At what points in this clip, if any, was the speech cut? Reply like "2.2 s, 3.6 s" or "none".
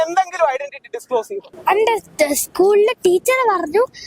1.4 s